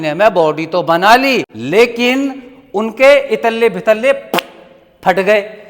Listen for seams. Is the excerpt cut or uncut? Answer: cut